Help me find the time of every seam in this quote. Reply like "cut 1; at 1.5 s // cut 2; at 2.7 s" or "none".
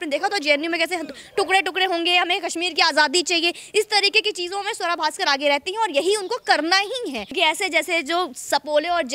cut 1; at 7.3 s